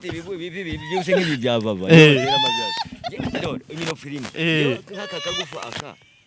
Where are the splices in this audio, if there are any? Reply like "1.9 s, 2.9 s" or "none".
none